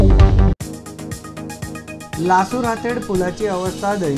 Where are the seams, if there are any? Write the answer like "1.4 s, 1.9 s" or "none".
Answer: 1.9 s